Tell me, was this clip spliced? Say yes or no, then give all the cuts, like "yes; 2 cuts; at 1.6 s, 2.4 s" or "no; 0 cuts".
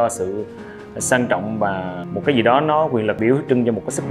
yes; 2 cuts; at 2.0 s, 3.2 s